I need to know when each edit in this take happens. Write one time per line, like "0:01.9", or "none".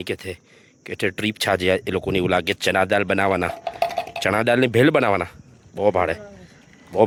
none